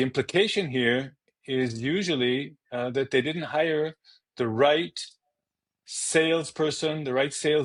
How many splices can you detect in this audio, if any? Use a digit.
0